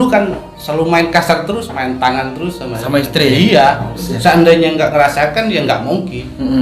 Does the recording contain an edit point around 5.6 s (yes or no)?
no